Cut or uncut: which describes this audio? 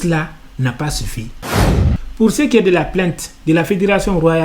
cut